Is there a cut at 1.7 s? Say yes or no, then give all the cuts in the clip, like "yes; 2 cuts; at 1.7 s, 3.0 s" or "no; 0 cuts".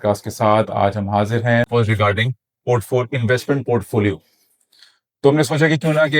yes; 1 cut; at 1.7 s